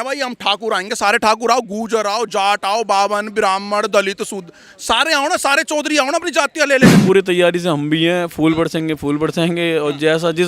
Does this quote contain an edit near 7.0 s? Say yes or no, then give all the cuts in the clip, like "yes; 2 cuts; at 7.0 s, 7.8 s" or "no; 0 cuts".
yes; 1 cut; at 7.0 s